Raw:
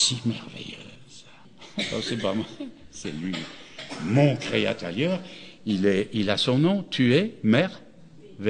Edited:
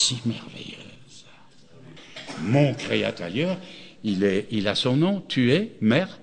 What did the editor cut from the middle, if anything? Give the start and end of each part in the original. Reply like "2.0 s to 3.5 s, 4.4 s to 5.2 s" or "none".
1.8 s to 3.4 s